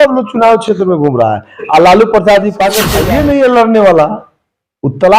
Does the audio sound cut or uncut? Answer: cut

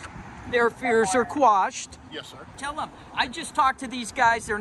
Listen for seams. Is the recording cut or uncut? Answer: cut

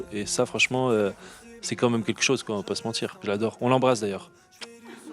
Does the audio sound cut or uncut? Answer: cut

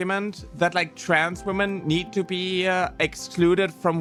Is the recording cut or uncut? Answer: uncut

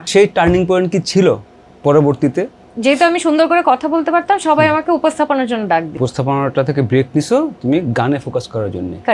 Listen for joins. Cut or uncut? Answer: cut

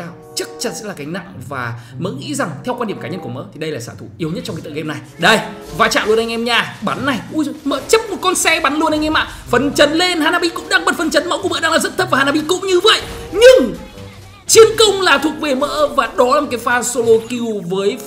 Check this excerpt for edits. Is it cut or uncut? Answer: uncut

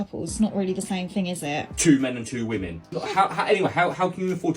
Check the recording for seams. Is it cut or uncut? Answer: cut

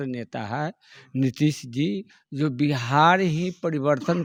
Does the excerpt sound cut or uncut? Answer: uncut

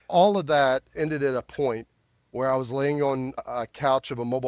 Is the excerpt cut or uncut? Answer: cut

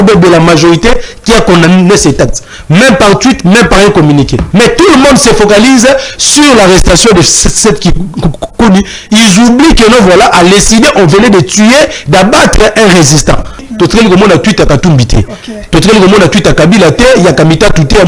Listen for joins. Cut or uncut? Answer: cut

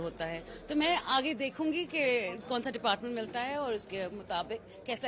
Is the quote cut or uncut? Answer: uncut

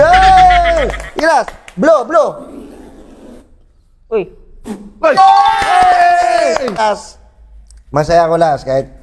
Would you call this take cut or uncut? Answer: cut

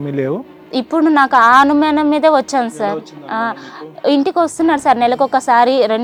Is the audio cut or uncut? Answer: uncut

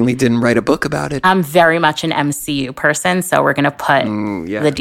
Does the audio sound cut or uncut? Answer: cut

